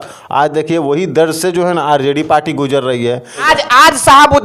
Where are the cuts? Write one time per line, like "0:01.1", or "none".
0:03.4